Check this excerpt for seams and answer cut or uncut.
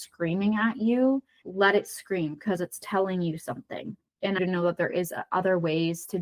cut